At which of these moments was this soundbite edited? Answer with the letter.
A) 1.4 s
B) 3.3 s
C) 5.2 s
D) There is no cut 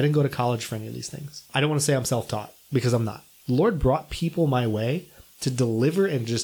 B